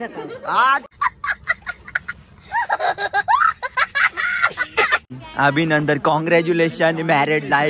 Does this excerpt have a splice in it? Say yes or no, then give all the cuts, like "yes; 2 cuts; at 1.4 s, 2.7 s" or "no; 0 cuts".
no; 0 cuts